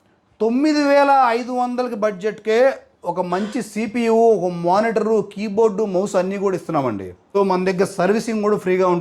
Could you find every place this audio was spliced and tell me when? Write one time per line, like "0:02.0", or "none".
0:07.4